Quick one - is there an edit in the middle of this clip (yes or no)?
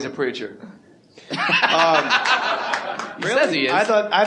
yes